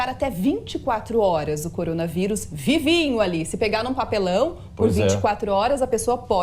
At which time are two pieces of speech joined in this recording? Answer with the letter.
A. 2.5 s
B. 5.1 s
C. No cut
A